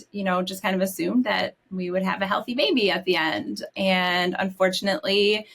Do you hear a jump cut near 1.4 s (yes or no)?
no